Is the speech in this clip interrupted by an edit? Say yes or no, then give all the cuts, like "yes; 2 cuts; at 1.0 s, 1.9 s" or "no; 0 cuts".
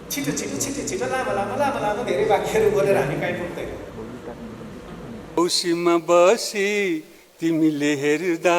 yes; 1 cut; at 5.2 s